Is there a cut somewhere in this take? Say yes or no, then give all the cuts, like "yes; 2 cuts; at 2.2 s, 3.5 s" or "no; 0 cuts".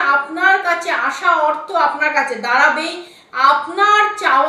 no; 0 cuts